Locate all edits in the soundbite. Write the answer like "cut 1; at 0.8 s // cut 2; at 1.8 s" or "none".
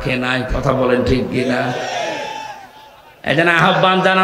none